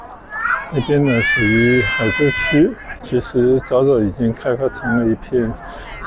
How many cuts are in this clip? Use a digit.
0